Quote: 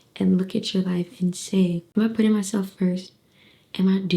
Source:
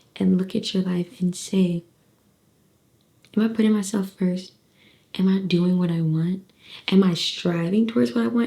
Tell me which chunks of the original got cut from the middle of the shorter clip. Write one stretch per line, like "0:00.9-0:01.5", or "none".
0:01.8-0:03.2

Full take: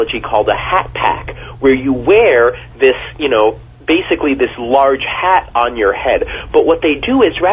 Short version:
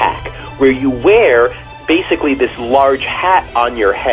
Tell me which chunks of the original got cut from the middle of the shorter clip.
0:02.7-0:03.6

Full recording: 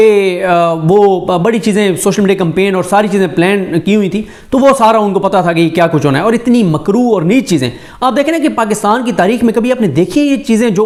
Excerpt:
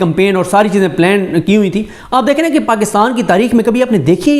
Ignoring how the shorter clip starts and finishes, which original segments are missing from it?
0:04.3-0:07.8

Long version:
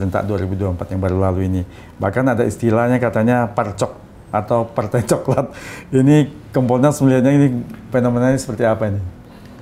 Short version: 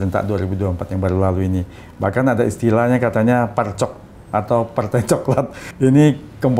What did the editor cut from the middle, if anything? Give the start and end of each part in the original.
0:05.6-0:05.7

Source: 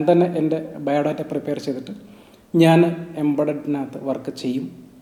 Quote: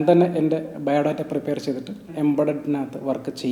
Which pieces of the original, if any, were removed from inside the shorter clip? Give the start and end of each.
0:02.1-0:03.1

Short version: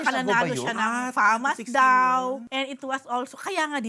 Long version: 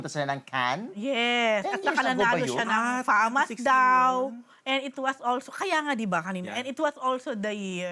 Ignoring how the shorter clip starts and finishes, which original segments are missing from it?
0:04.4-0:04.6

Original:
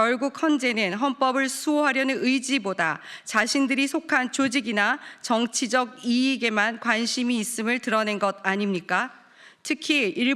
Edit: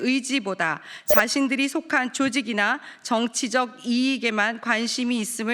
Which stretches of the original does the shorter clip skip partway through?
none

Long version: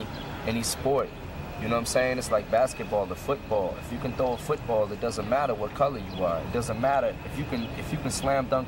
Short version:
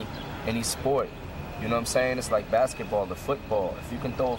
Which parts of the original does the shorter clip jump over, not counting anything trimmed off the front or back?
none

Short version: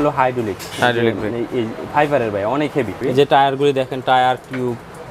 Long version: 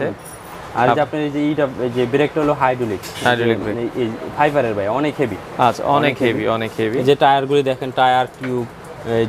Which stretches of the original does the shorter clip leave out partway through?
0:05.4-0:06.9

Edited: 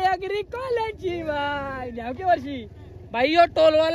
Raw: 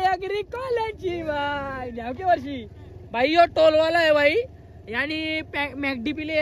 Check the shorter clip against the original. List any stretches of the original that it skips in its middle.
none

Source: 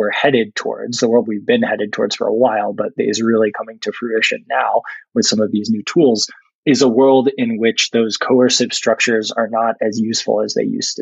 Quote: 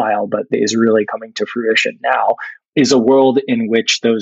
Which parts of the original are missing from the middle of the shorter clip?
0:05.0-0:06.4

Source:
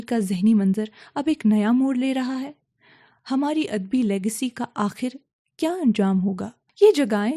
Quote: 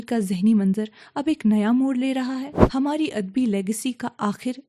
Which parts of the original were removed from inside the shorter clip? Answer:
0:02.6-0:03.1

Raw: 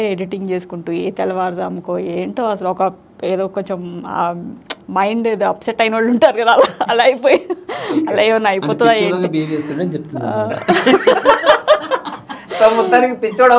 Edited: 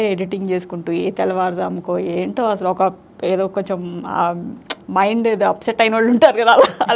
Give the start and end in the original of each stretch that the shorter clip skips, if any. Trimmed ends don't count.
none

